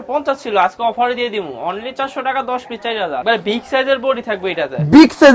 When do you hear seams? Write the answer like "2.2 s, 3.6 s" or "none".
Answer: 3.2 s